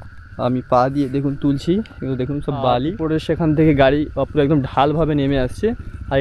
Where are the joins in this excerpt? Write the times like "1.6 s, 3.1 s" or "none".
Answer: 3.0 s